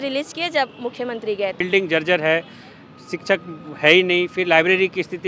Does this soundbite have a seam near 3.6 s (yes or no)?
no